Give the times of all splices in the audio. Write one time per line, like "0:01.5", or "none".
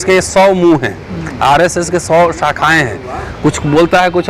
none